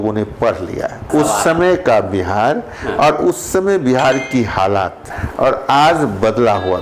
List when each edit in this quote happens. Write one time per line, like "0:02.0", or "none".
0:01.1
0:05.2